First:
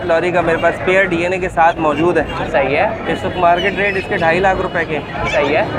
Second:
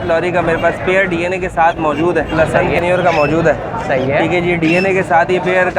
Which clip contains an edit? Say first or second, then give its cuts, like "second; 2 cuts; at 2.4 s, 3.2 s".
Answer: second; 1 cut; at 2.3 s